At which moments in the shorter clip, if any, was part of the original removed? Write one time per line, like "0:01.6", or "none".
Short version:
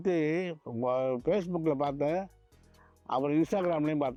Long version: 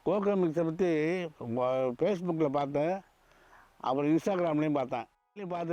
none

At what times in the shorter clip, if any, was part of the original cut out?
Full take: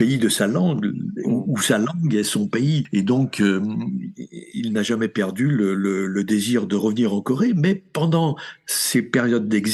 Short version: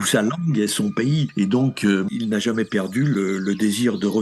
0:02.1
0:03.1

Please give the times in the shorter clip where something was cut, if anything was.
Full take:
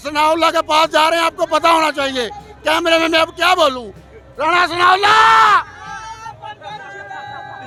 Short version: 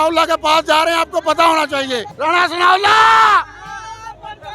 0:02.1

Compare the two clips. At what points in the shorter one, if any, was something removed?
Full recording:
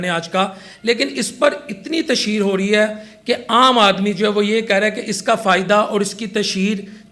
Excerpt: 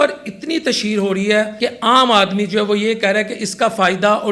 0:01.5

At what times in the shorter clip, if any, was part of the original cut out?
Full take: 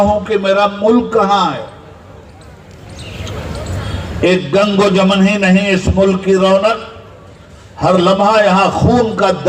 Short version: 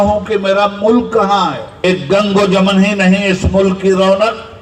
0:01.8

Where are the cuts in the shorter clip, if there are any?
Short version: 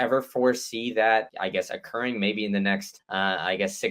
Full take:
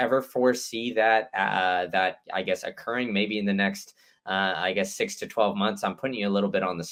0:01.3
0:03.0

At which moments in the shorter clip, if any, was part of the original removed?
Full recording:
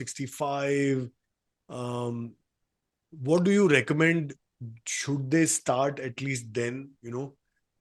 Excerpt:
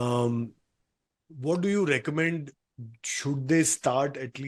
none

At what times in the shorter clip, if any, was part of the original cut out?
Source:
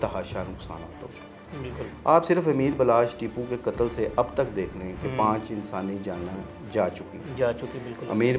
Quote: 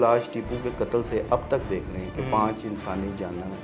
none

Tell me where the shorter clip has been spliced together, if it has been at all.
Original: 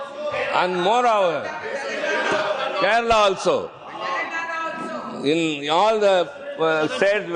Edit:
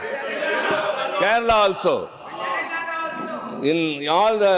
none

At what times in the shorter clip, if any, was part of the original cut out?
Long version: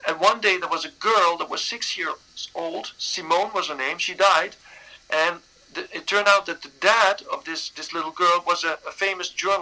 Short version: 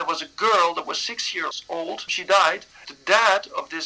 0:01.9
0:02.9

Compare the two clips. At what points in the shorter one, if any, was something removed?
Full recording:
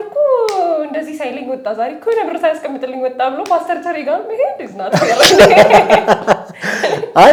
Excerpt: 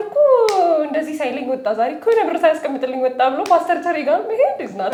none

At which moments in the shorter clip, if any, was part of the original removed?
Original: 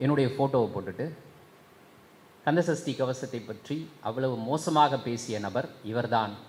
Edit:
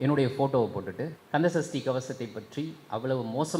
0:01.2

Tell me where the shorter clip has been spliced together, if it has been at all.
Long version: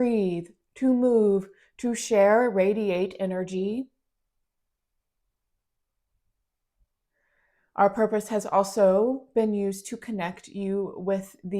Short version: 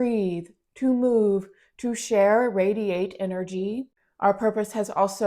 0:04.0

